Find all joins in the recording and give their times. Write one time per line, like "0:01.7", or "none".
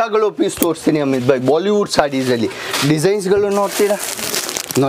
none

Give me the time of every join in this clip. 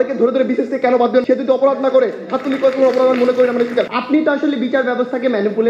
0:04.0

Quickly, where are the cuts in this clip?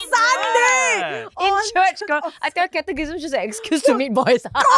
none

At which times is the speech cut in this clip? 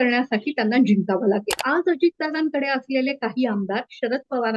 0:01.6

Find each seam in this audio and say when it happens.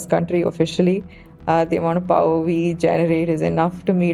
none

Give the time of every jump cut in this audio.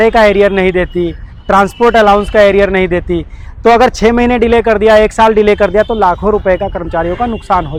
none

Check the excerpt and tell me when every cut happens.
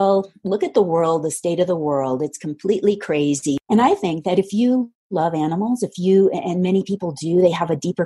0:03.6

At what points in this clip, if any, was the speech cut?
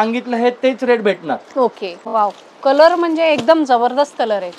0:01.9

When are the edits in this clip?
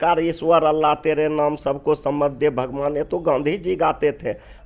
none

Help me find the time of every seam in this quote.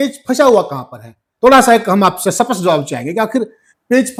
none

